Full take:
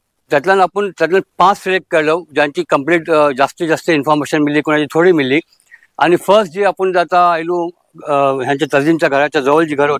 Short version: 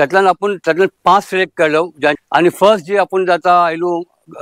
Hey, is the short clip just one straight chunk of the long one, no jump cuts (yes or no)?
no